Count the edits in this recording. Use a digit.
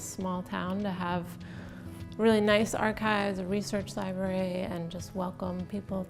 0